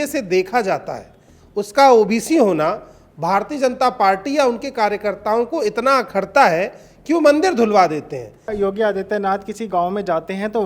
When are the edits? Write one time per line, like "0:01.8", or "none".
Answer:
0:08.5

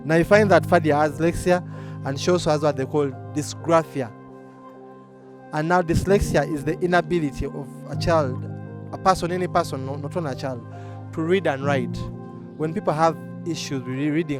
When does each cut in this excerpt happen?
0:01.2

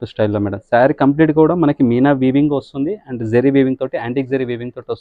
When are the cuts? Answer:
none

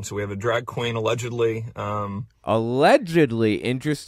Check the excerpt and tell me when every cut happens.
none

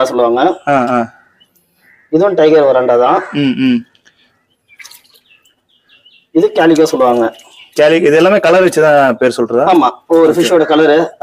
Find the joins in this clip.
none

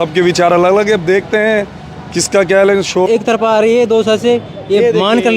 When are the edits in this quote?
0:03.1

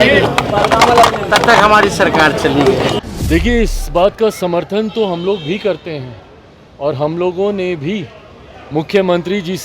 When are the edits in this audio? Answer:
0:03.0

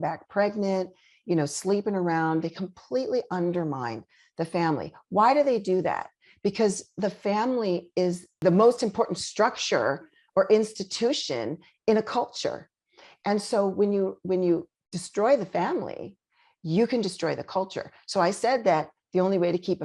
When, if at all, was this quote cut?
0:08.3

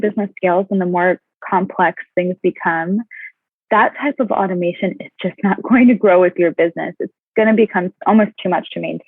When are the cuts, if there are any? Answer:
none

